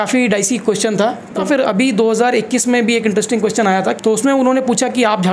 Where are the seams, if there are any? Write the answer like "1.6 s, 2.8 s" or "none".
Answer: 1.4 s, 4.0 s